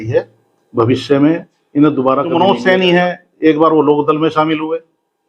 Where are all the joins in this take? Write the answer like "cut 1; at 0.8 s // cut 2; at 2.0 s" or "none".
cut 1; at 2.3 s